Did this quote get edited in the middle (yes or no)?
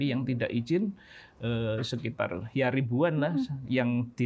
no